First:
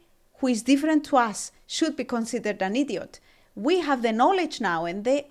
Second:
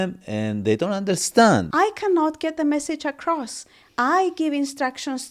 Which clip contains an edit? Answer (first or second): second